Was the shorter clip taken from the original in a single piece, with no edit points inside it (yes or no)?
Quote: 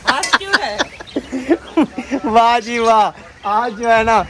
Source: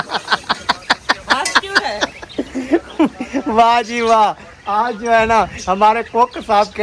yes